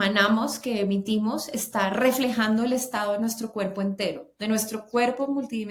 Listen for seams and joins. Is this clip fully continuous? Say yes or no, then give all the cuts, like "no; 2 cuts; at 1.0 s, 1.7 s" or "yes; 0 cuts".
yes; 0 cuts